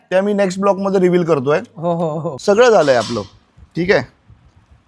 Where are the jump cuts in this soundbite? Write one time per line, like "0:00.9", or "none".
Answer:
0:02.3